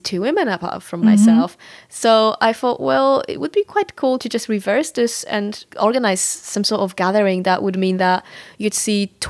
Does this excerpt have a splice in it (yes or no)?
no